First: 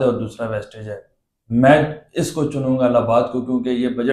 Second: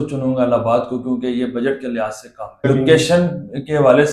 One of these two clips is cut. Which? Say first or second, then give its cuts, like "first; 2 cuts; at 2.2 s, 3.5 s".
second; 1 cut; at 2.7 s